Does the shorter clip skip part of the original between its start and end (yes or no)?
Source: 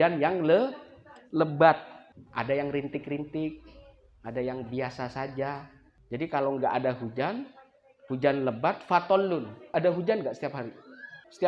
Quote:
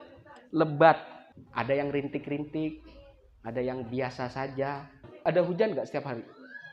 yes